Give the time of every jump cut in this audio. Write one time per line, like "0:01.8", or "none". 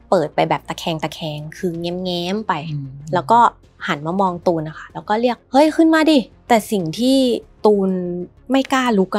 0:06.3
0:07.5
0:08.3